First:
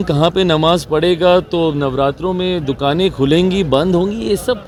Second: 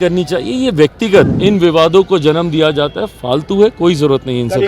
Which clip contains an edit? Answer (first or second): second